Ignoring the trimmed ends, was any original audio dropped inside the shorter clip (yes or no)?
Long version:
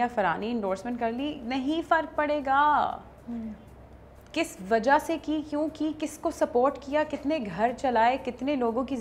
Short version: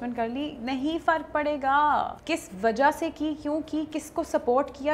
yes